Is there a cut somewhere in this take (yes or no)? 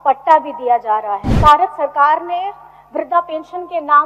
yes